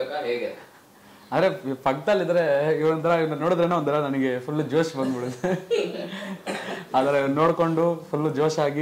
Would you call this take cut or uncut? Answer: uncut